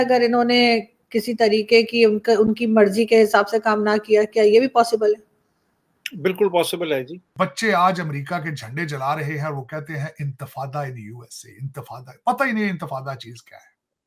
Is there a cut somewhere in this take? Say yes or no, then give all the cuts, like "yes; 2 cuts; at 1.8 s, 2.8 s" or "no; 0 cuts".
yes; 1 cut; at 7.2 s